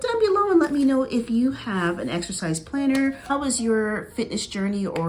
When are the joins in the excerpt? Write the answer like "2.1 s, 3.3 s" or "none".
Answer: 3.3 s